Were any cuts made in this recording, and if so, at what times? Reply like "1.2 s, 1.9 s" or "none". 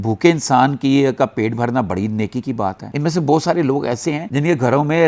2.8 s, 4.2 s

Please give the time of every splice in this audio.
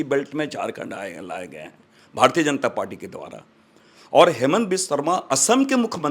none

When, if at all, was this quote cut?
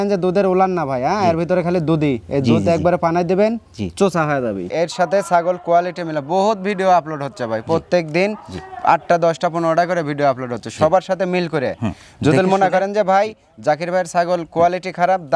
4.7 s

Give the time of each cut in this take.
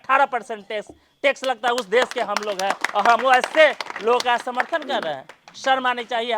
none

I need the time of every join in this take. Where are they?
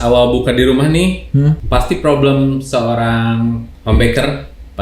1.6 s, 3.7 s

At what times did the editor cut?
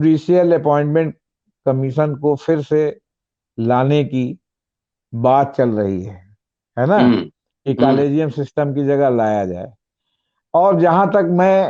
none

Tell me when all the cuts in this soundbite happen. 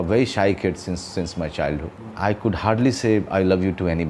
none

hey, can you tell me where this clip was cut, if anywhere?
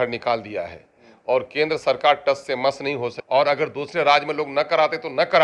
3.1 s

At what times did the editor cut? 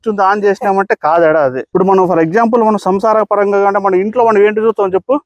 1.6 s

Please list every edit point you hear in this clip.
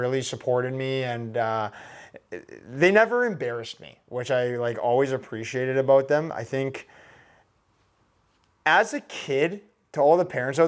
none

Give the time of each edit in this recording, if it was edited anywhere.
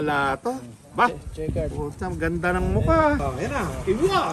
3.3 s

